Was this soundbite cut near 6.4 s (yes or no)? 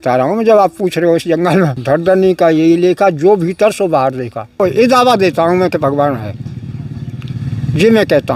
no